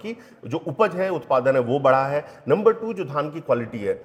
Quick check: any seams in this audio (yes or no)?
no